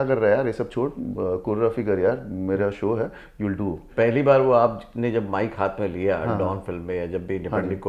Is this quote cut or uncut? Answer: cut